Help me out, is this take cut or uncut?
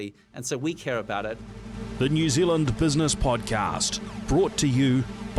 cut